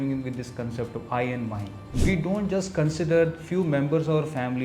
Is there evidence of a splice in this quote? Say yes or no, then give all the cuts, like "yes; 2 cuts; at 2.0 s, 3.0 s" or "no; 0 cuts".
yes; 1 cut; at 1.9 s